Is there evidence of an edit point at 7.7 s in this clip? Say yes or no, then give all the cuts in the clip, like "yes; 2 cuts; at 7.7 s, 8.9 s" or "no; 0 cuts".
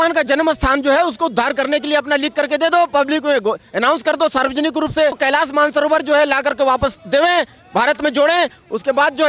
no; 1 cut; at 5.2 s